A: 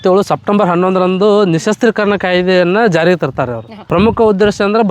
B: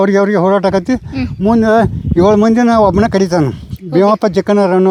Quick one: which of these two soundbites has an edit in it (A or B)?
A